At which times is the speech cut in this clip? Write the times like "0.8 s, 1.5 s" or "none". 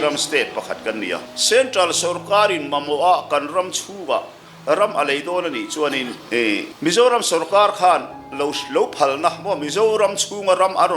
1.3 s